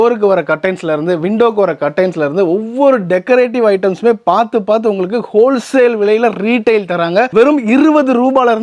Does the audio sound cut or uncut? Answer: uncut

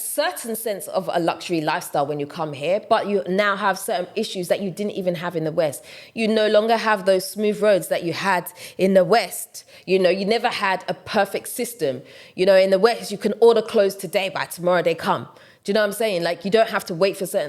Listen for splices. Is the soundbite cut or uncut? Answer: uncut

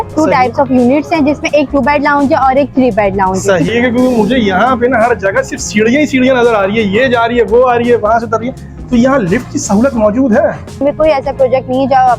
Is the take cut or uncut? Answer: cut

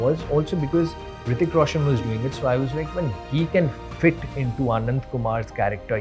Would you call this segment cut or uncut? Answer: uncut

